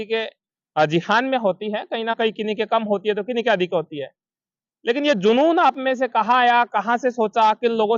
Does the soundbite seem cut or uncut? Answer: uncut